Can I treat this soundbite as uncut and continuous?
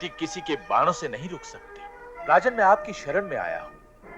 no; 1 cut; at 2.1 s

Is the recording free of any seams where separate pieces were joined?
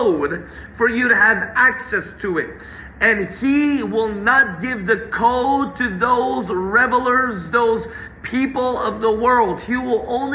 yes; 0 cuts

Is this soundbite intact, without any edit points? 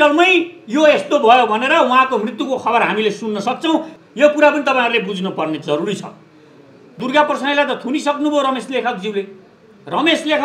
no; 2 cuts; at 4.0 s, 7.0 s

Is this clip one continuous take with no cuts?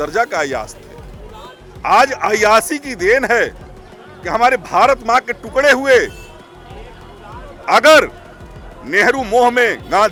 yes; 0 cuts

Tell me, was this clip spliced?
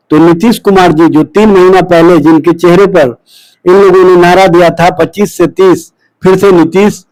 no; 0 cuts

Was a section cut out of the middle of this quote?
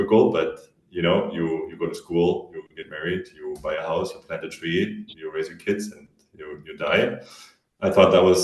no; 0 cuts

